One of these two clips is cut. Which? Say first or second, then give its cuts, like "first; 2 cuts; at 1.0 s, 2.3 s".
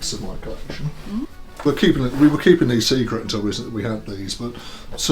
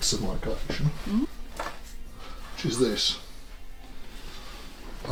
first; 1 cut; at 1.6 s